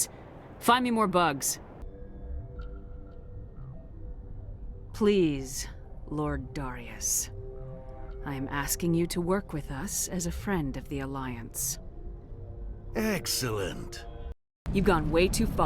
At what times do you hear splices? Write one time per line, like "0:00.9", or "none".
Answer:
0:01.8
0:14.3